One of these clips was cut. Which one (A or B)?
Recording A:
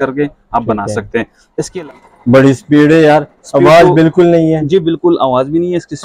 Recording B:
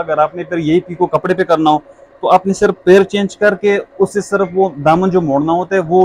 A